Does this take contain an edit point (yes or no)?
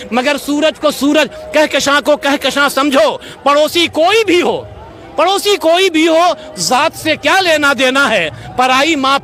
no